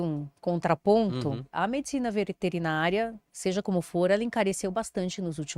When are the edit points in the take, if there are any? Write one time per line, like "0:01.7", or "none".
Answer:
0:01.5